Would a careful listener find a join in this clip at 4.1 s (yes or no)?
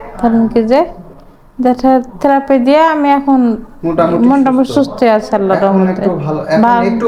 no